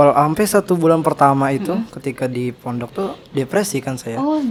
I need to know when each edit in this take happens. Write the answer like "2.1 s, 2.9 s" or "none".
none